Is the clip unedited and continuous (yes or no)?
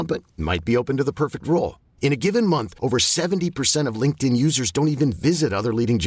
yes